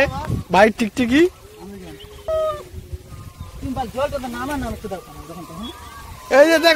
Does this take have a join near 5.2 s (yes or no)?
no